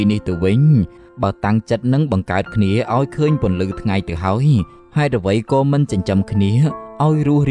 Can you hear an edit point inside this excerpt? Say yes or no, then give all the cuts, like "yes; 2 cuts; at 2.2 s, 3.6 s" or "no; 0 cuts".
yes; 1 cut; at 1.0 s